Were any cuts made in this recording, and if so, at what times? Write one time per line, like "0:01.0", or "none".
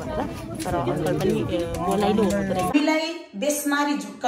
0:02.7